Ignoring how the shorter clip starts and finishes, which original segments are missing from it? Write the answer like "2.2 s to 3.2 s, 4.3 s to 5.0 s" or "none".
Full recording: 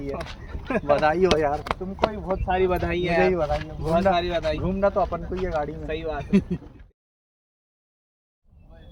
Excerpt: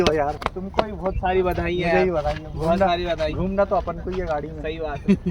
none